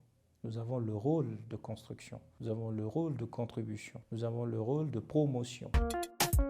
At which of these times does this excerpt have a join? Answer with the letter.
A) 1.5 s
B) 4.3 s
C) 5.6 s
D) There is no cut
C